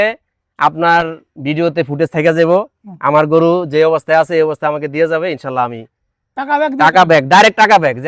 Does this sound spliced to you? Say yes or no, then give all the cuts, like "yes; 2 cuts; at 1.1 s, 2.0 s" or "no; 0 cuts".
no; 0 cuts